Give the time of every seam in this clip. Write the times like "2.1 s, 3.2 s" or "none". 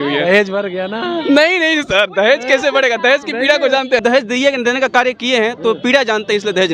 4.0 s